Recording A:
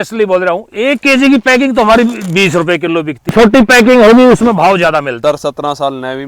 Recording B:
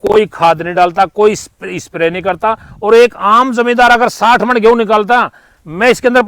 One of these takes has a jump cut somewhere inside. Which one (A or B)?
A